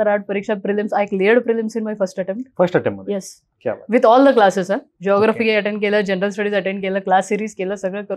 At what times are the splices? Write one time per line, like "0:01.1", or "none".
none